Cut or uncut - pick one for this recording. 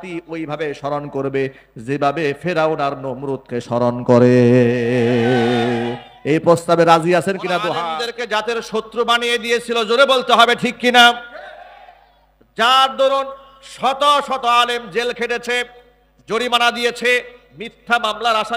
cut